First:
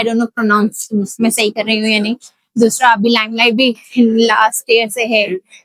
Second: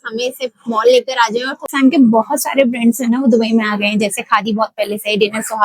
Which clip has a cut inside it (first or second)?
second